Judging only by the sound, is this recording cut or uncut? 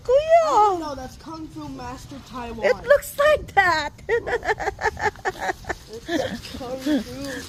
uncut